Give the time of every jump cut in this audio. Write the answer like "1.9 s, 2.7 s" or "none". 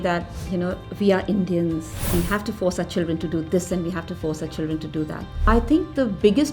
1.9 s, 5.4 s